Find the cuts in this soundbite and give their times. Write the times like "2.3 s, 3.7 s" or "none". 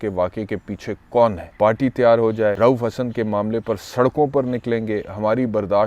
1.4 s, 2.6 s